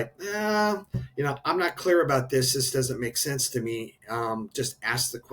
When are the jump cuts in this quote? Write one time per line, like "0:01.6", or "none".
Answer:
none